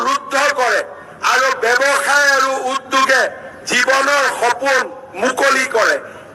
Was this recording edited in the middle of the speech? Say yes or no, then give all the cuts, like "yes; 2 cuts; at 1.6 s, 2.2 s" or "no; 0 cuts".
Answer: no; 0 cuts